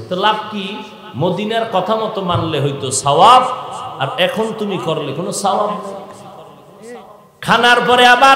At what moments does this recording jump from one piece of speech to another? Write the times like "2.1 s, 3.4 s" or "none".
7.2 s